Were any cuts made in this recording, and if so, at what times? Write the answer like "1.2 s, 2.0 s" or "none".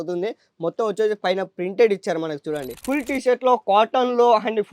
2.7 s